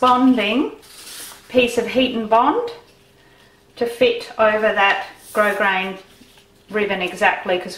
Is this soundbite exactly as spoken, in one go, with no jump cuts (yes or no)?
no